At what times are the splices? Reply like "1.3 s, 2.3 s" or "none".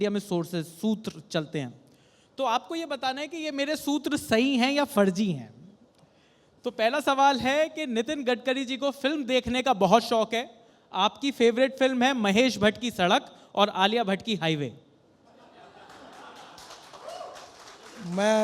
none